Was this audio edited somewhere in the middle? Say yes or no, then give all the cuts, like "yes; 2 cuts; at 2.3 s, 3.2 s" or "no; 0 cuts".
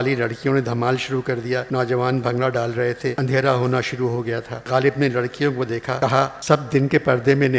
yes; 4 cuts; at 1.7 s, 3.2 s, 4.5 s, 6.3 s